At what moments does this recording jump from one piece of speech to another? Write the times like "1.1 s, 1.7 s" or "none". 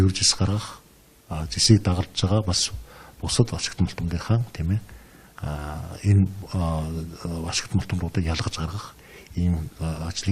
6.8 s